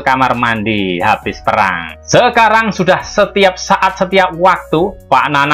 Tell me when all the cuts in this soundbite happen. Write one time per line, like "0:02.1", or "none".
0:01.9